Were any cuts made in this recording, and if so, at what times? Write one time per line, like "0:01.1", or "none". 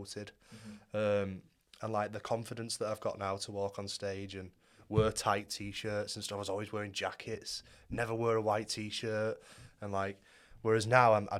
none